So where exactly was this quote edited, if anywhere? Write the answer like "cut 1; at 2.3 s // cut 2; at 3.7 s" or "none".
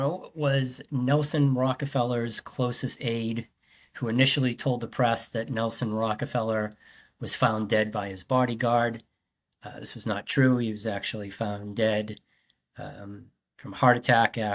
none